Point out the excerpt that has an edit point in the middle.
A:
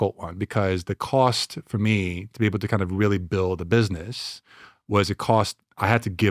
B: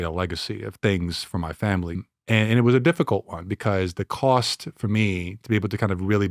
B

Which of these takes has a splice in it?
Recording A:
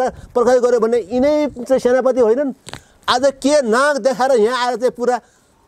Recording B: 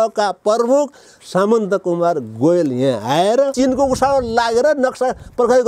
B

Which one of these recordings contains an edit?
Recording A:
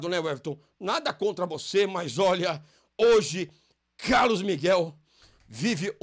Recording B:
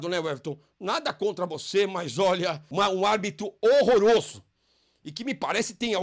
B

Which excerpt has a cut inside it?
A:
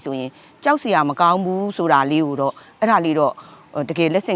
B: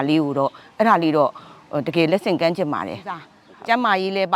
B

